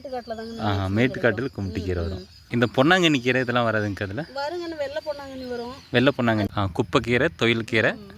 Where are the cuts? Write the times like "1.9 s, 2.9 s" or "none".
2.3 s, 6.5 s